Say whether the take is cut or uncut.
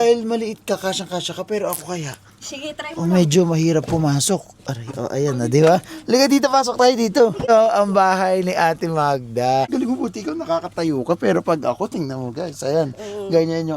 cut